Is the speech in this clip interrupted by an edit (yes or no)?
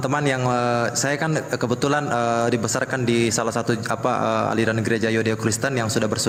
no